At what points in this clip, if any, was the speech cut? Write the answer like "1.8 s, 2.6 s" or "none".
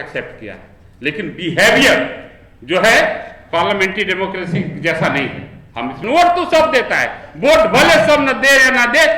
6.0 s